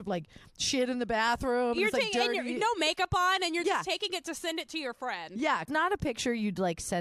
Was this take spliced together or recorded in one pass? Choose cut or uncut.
cut